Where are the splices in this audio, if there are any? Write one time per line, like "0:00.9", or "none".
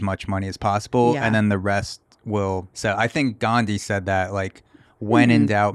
0:02.7